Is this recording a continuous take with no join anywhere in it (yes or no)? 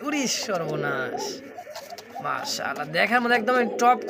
yes